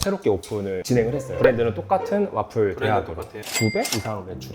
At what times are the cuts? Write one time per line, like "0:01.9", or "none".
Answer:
0:03.4